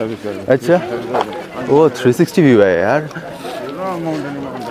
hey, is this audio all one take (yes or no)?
yes